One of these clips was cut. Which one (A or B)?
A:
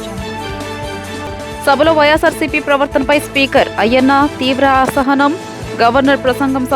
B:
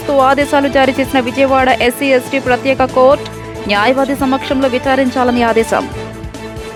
A